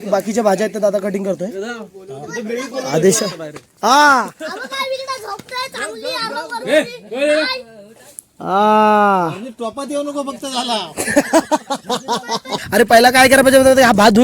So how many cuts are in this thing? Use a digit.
1